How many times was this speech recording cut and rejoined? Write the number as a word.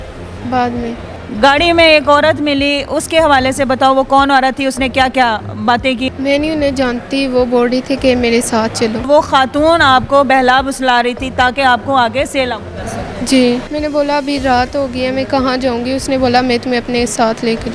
four